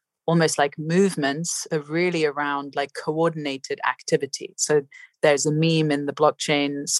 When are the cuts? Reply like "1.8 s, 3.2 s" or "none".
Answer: none